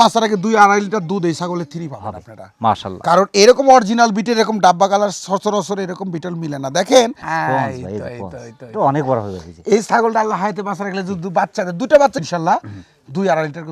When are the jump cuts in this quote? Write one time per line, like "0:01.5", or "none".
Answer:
0:07.2